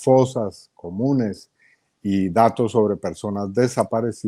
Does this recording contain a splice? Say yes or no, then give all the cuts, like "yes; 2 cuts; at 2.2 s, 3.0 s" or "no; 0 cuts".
no; 0 cuts